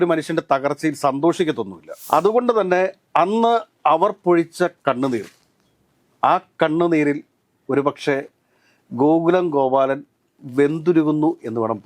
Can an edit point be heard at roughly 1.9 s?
yes; 1 cut; at 1.9 s

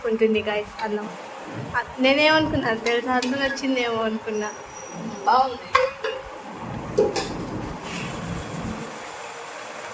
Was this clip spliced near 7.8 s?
yes; 2 cuts; at 1.0 s, 7.8 s

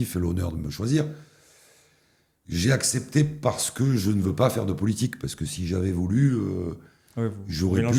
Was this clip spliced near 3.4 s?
no; 0 cuts

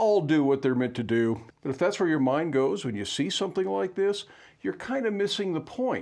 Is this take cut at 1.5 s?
yes; 1 cut; at 1.5 s

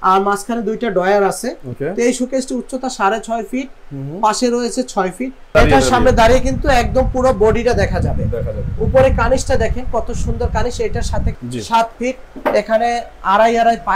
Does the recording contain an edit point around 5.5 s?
yes; 2 cuts; at 5.5 s, 11.3 s

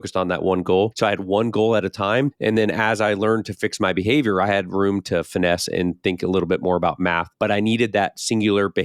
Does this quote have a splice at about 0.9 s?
yes; 3 cuts; at 0.9 s, 2.3 s, 7.3 s

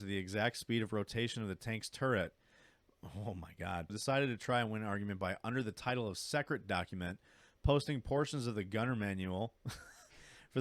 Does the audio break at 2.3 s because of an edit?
no; 1 cut; at 3.9 s

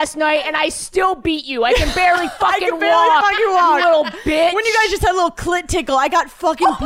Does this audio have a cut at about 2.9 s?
no; 0 cuts

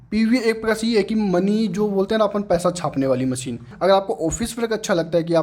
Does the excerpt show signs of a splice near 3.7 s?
yes; 1 cut; at 3.7 s

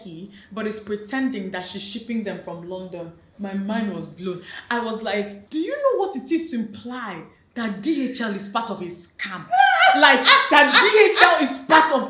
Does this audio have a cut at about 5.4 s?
yes; 1 cut; at 5.4 s

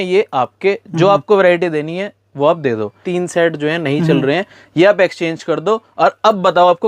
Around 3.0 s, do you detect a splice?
yes; 1 cut; at 3.0 s

